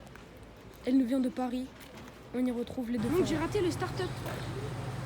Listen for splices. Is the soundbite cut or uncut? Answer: cut